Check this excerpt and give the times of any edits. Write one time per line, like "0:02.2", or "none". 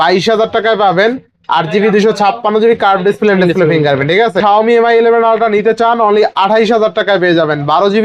0:04.4